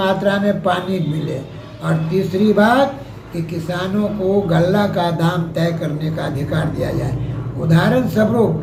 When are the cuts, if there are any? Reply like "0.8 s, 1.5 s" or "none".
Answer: none